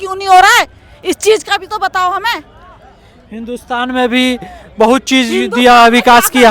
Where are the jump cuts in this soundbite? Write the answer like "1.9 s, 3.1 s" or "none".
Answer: none

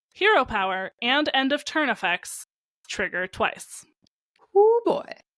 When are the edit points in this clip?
none

